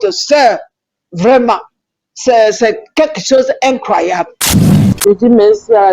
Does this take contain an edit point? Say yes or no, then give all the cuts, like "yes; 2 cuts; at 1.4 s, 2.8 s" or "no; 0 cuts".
yes; 1 cut; at 4.4 s